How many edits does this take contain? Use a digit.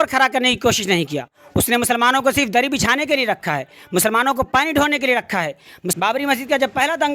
1